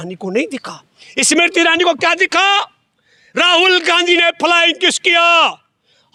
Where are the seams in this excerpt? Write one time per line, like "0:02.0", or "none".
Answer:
none